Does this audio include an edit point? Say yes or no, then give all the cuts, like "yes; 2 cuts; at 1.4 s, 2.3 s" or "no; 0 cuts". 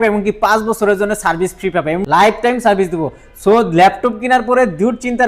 yes; 1 cut; at 2.0 s